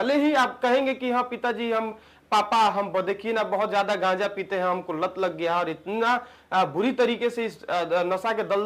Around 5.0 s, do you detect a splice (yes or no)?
no